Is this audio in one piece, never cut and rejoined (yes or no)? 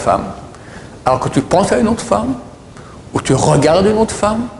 yes